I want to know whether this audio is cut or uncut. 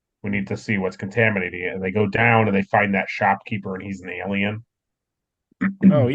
uncut